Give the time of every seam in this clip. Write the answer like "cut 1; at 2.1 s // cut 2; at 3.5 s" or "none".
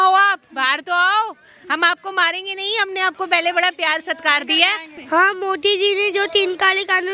cut 1; at 4.9 s

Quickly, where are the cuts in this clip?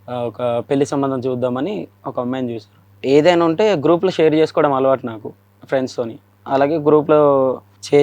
cut 1; at 2.8 s // cut 2; at 6.4 s

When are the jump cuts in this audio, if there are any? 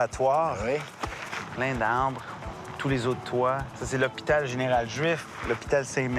cut 1; at 1.3 s

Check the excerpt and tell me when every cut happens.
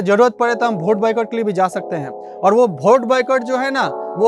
none

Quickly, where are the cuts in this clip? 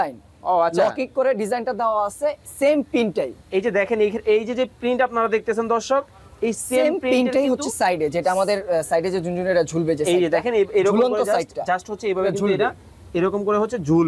none

